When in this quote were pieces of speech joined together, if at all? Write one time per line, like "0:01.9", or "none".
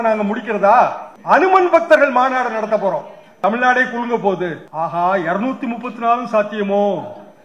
0:01.1
0:03.2
0:04.6